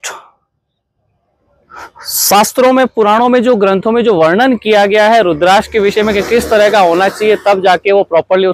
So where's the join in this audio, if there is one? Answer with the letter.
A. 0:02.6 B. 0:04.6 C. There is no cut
C